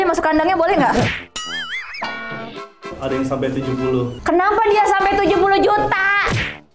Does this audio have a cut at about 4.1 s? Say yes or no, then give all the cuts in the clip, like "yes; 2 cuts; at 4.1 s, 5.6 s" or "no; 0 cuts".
yes; 2 cuts; at 2.9 s, 4.1 s